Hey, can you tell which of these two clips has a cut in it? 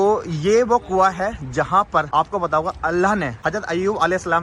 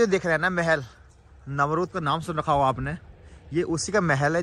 first; 2 cuts; at 2.1 s, 3.3 s

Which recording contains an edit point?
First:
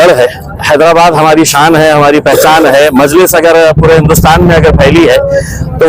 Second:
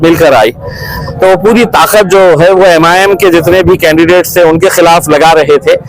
second; 1 cut; at 0.9 s

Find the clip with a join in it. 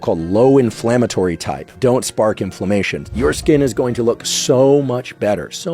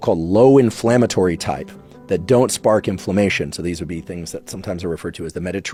first; 2 cuts; at 1.7 s, 3.0 s

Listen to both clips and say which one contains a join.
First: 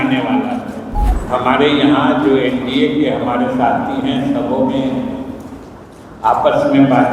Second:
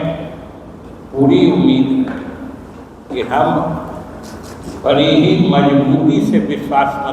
first; 1 cut; at 1.1 s

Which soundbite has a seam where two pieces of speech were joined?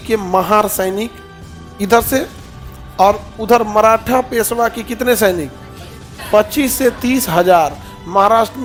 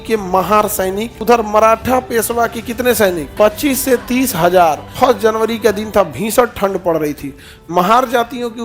second; 3 cuts; at 1.1 s, 3.2 s, 4.9 s

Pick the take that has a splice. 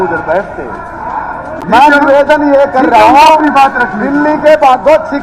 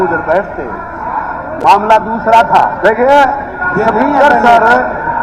first; 1 cut; at 1.5 s

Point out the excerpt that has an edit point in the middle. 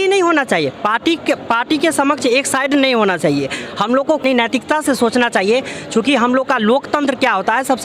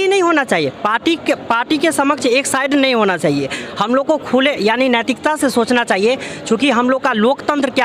first; 1 cut; at 4.2 s

